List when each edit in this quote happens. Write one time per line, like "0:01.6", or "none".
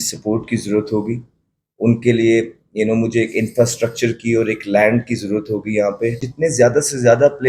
0:06.3